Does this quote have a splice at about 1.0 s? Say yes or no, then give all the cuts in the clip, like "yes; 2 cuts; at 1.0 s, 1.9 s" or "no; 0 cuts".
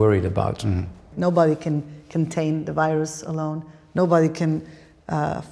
yes; 1 cut; at 1.0 s